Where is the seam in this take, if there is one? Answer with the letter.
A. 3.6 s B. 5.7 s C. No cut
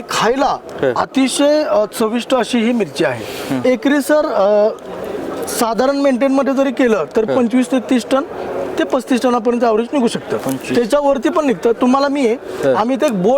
A